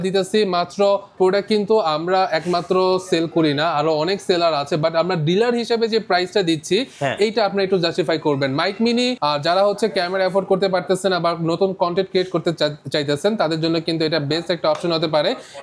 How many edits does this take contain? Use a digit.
2